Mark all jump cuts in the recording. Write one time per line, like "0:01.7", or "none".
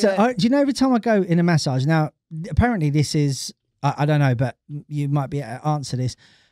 none